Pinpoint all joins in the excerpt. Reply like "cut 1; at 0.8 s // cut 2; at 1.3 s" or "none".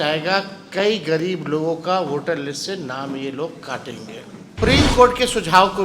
cut 1; at 4.6 s